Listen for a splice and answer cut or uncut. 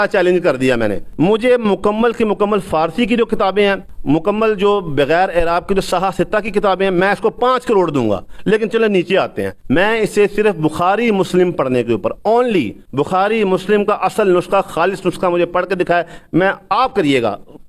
cut